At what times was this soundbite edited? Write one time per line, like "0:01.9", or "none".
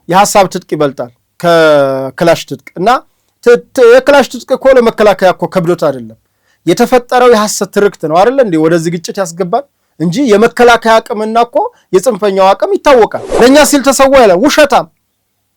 0:13.2